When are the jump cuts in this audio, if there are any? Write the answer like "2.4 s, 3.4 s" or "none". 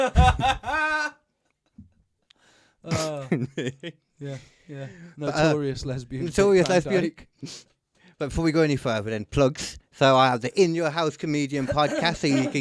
none